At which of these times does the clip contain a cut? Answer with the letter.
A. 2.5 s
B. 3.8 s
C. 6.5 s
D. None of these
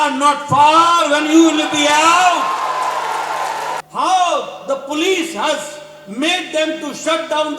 B